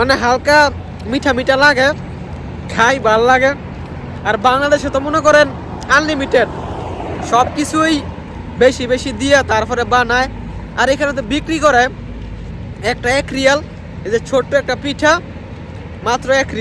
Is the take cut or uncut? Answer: uncut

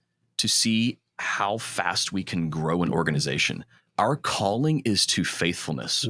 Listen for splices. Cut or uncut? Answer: uncut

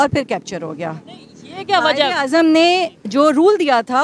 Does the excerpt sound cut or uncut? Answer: uncut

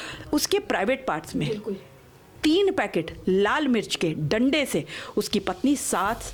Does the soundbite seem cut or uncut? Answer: uncut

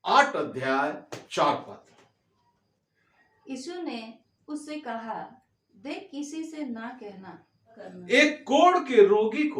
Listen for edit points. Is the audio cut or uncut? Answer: cut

